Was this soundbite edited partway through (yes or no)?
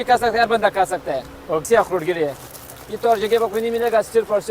yes